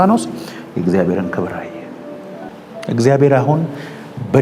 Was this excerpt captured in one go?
no; 1 cut; at 2.5 s

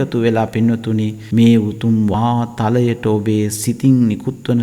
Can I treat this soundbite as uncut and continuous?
no; 1 cut; at 1.2 s

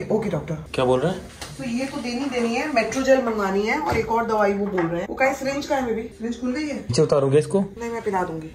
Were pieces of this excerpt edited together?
yes; 1 cut; at 6.9 s

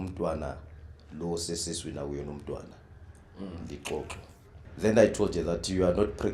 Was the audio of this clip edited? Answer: yes; 1 cut; at 4.6 s

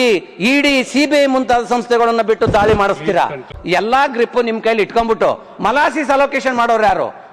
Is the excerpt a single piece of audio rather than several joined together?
no; 1 cut; at 3.5 s

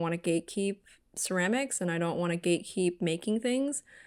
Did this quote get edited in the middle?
no; 0 cuts

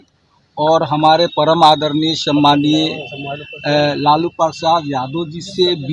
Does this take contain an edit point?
no; 0 cuts

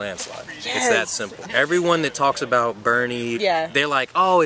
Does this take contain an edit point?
yes; 2 cuts; at 1.5 s, 3.4 s

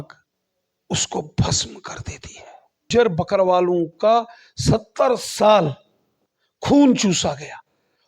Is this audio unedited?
no; 1 cut; at 2.9 s

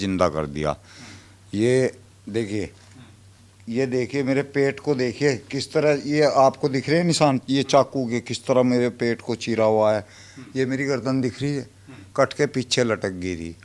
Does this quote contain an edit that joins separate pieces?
no; 0 cuts

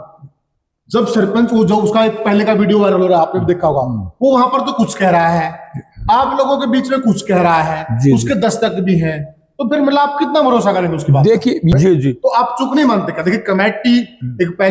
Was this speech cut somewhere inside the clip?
yes; 1 cut; at 11.7 s

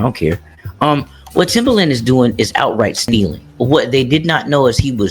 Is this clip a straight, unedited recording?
no; 1 cut; at 3.4 s

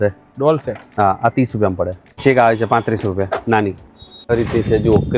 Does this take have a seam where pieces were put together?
yes; 2 cuts; at 2.2 s, 4.3 s

